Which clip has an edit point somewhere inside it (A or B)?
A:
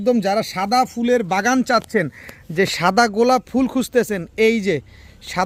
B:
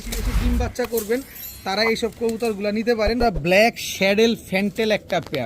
B